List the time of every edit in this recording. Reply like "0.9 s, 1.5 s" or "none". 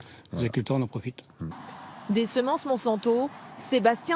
1.3 s